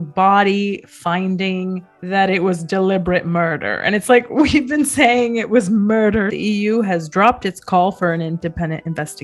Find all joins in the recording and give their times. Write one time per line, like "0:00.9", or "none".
0:06.3